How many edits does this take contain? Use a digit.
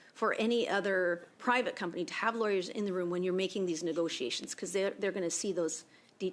0